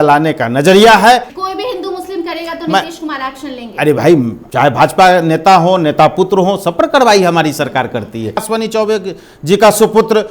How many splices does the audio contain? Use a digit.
3